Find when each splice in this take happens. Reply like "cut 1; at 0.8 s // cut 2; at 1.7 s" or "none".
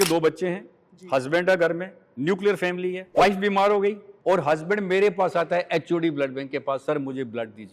cut 1; at 3.0 s // cut 2; at 4.1 s